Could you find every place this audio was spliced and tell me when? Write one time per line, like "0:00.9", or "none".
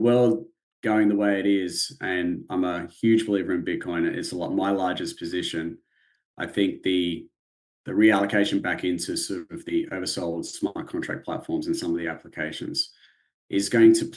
none